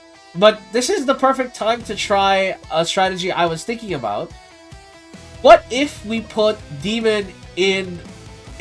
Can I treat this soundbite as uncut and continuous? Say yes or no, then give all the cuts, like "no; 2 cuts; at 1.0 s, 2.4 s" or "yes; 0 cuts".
yes; 0 cuts